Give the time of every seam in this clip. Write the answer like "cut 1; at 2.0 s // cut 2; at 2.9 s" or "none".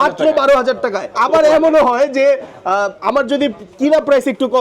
cut 1; at 1.1 s